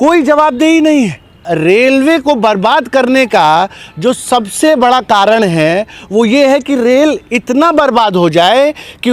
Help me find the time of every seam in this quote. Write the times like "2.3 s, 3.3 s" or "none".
1.4 s